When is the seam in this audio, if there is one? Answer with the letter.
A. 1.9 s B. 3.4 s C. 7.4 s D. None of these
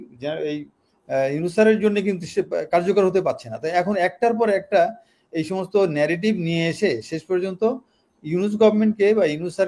D